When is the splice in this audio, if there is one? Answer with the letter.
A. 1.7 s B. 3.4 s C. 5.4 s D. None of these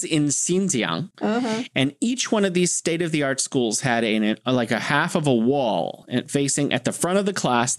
A